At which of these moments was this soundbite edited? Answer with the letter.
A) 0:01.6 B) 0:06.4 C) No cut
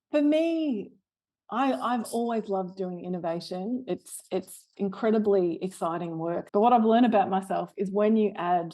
B